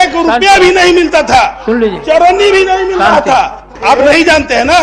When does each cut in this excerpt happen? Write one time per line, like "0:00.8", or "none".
0:03.6